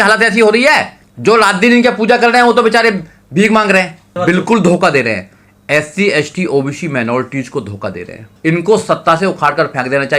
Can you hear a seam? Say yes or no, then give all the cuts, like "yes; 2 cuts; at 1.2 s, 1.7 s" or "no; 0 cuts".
yes; 2 cuts; at 4.1 s, 8.3 s